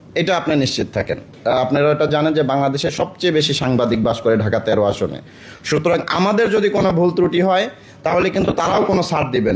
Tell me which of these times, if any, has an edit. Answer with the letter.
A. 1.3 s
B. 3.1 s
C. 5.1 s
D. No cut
A